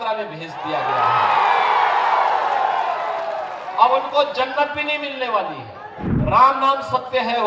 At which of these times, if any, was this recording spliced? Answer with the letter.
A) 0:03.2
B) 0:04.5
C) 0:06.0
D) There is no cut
C